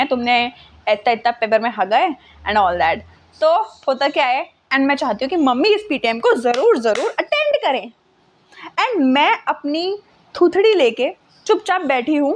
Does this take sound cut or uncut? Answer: cut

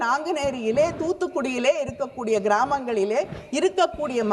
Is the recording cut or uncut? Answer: uncut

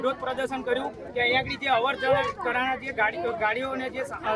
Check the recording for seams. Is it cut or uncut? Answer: uncut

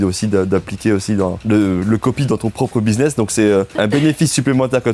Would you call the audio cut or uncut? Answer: cut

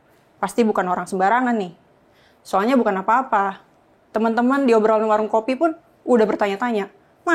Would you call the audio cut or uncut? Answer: uncut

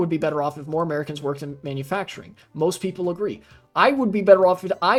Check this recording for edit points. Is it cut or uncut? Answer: uncut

